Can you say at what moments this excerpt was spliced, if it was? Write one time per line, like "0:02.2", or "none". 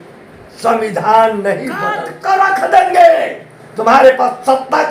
0:02.1